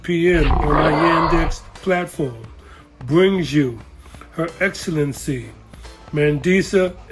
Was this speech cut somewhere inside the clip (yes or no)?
no